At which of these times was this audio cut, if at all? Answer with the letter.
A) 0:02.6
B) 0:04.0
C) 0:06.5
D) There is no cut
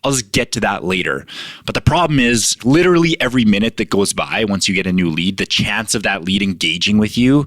A